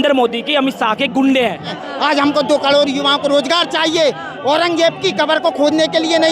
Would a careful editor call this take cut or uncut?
cut